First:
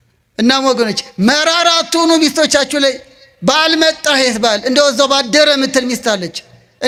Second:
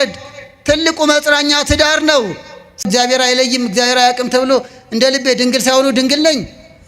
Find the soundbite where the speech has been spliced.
second; 1 cut; at 2.9 s

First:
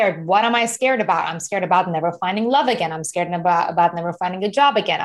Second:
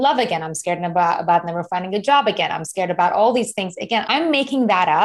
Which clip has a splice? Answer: second; 1 cut; at 4.0 s

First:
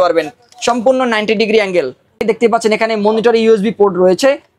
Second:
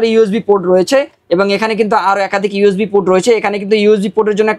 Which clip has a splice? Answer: first; 1 cut; at 2.2 s

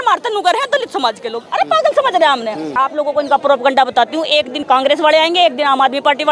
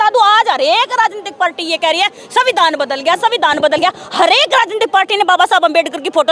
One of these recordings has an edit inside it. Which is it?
first; 2 cuts; at 2.7 s, 4.6 s

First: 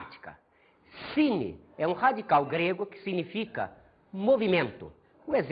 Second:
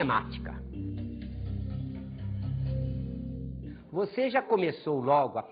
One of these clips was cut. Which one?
first; 1 cut; at 0.9 s

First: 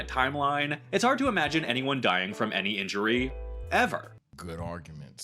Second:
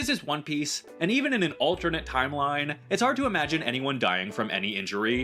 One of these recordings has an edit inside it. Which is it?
first; 1 cut; at 4.3 s

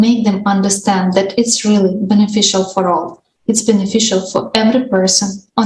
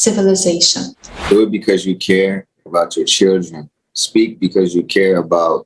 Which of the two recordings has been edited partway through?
second; 1 cut; at 1.1 s

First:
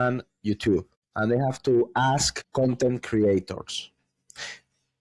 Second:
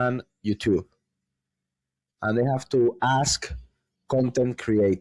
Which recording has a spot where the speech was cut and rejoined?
first; 2 cuts; at 1.0 s, 2.4 s

